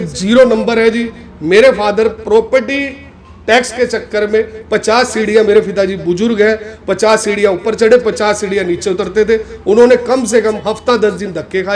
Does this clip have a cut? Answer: no; 0 cuts

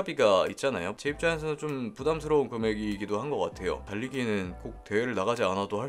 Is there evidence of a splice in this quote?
yes; 2 cuts; at 1.0 s, 3.9 s

